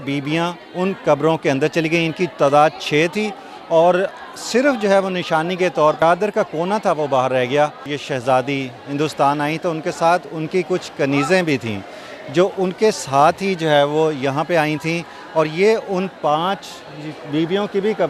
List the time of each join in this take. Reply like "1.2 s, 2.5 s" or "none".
6.0 s, 7.9 s

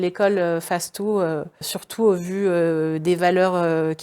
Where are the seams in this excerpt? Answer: 1.8 s

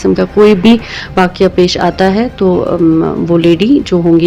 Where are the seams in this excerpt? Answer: none

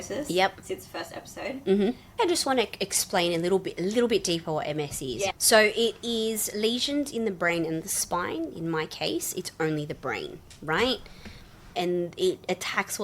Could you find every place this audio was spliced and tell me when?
2.1 s, 5.3 s, 11.7 s

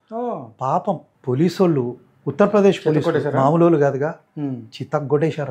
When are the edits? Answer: none

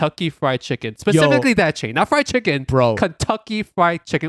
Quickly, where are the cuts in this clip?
none

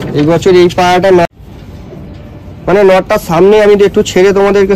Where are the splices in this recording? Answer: 1.2 s

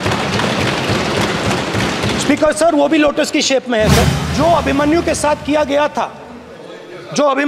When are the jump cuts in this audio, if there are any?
4.3 s

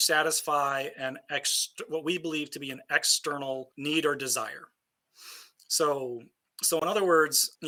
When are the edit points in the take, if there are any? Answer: none

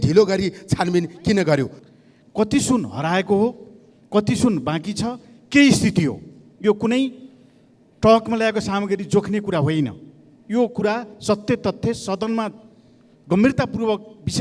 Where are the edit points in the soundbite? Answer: 1.9 s

